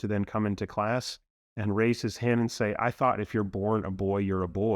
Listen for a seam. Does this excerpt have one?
no; 0 cuts

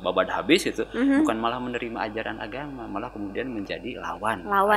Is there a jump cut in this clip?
no; 0 cuts

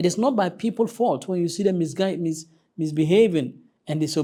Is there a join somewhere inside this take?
no; 0 cuts

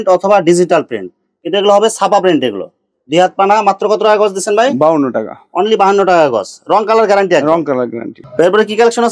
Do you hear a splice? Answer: no; 0 cuts

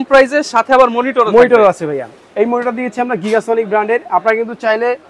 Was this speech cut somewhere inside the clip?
no; 0 cuts

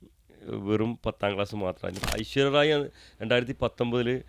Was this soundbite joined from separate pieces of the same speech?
yes; 1 cut; at 2.0 s

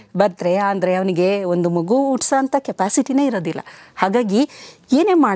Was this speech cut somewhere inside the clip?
no; 0 cuts

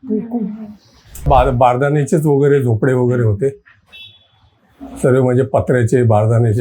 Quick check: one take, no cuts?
no; 1 cut; at 1.2 s

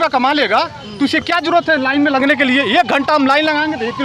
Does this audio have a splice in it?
no; 0 cuts

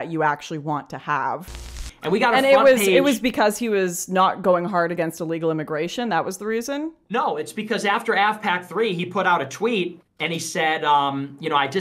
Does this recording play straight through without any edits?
no; 2 cuts; at 1.8 s, 7.0 s

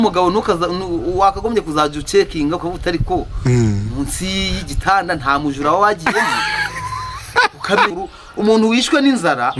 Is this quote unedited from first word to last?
no; 1 cut; at 7.9 s

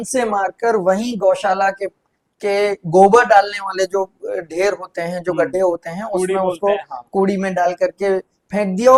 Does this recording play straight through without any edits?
yes; 0 cuts

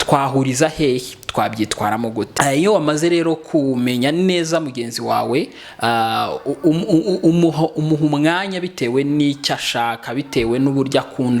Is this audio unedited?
no; 1 cut; at 2.3 s

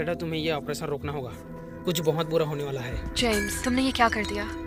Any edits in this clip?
no; 0 cuts

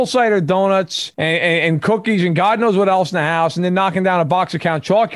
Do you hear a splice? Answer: yes; 1 cut; at 1.0 s

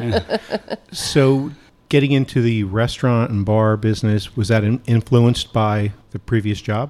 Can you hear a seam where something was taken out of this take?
no; 0 cuts

